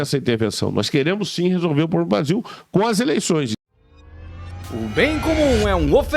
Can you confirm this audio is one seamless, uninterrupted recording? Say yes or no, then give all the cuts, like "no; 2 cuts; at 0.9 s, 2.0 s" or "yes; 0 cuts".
no; 1 cut; at 3.5 s